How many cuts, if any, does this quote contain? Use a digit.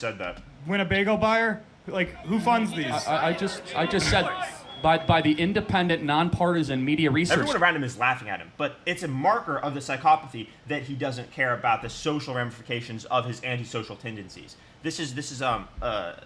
1